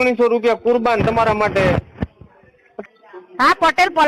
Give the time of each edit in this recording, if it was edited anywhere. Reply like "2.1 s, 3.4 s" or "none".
2.6 s